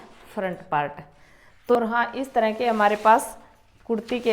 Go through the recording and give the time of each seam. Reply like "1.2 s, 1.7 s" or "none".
1.8 s